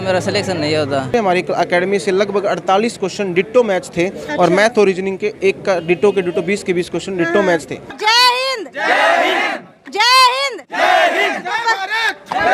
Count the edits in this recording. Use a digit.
2